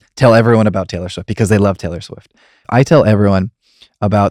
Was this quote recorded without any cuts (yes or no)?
no